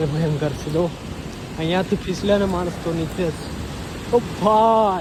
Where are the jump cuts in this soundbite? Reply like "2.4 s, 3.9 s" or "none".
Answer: none